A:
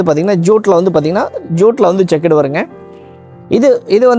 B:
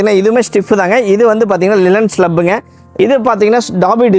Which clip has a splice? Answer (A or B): B